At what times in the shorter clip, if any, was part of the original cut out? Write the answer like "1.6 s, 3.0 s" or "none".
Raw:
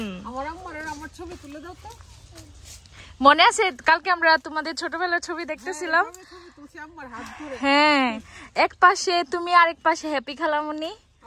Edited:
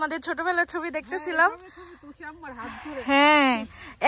none